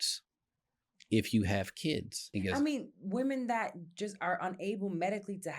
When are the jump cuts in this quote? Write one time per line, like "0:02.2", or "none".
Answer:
0:02.2

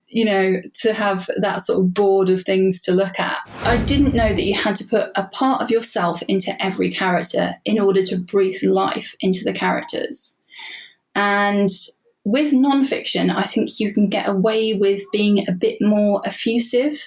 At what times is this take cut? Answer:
0:03.6

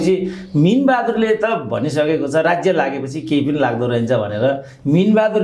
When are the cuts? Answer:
none

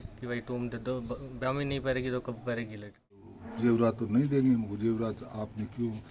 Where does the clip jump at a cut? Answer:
0:03.4

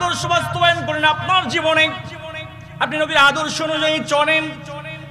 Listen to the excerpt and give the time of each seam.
none

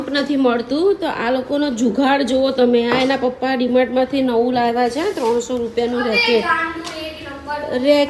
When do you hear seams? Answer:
none

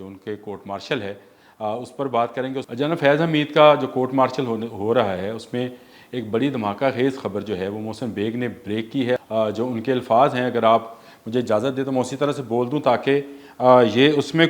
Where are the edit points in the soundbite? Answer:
0:02.7
0:09.2

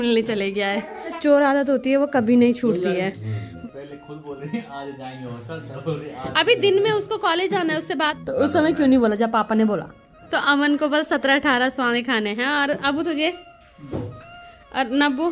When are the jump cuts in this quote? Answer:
0:01.2
0:03.5
0:08.2
0:10.5

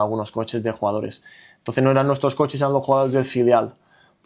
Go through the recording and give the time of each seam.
none

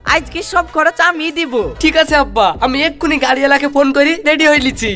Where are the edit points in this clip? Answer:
none

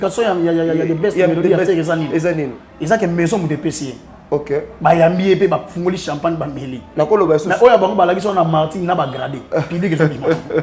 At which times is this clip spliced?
none

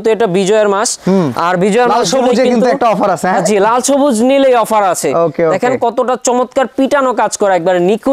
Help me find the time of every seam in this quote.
none

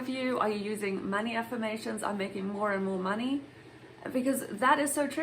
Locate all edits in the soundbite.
none

